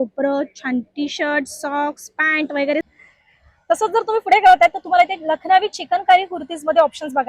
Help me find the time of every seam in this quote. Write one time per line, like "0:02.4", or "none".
0:02.9